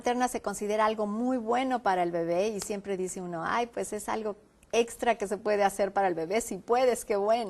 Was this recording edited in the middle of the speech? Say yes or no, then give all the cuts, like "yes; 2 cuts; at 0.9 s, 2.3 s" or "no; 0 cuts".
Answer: yes; 1 cut; at 2.6 s